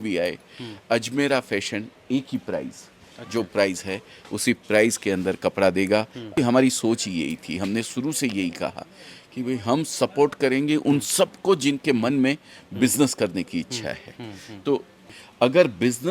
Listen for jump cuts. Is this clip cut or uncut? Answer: cut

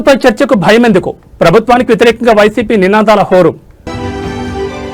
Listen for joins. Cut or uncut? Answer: cut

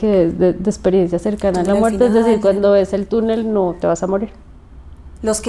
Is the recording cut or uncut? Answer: uncut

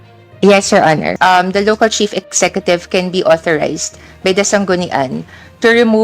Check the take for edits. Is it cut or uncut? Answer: cut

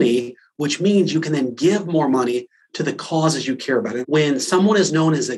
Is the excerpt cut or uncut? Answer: cut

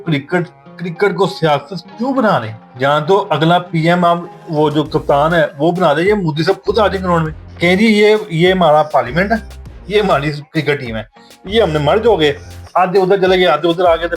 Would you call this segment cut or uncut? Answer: cut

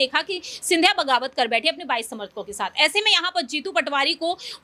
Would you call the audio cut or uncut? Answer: uncut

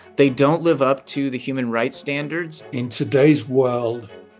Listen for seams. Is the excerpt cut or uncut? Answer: cut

